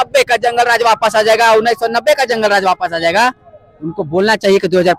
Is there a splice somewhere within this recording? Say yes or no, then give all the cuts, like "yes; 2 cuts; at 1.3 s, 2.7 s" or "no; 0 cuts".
no; 0 cuts